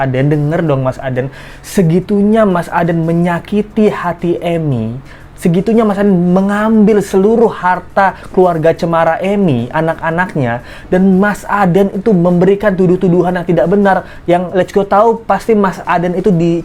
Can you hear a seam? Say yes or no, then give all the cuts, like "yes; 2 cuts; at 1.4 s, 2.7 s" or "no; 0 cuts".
no; 0 cuts